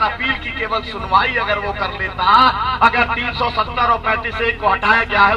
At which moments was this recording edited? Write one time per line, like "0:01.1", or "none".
none